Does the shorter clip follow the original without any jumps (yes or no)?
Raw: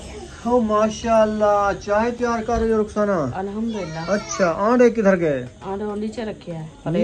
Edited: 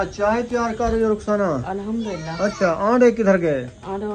no